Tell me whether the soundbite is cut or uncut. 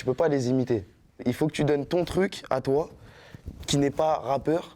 cut